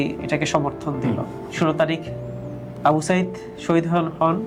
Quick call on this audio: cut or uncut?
uncut